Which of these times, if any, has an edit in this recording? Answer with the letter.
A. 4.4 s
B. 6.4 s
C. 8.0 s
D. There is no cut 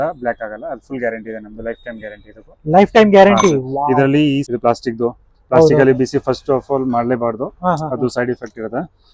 A